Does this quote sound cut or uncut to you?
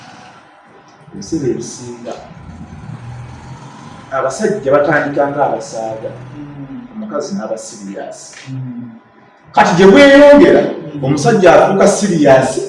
uncut